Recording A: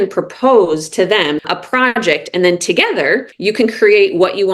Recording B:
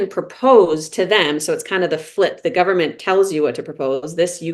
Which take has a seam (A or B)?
A